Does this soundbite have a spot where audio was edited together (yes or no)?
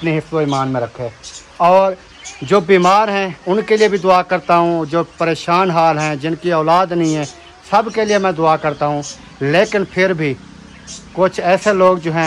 no